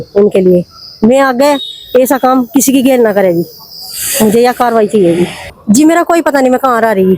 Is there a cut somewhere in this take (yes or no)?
yes